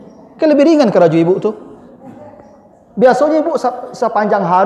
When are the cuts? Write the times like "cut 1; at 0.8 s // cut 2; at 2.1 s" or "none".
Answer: none